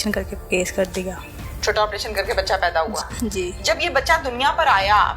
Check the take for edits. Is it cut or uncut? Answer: cut